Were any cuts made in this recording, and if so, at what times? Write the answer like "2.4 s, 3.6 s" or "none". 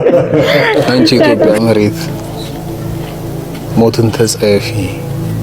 1.5 s